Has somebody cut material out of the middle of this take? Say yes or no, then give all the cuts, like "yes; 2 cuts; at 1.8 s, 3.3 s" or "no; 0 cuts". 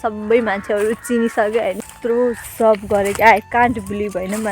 yes; 1 cut; at 1.8 s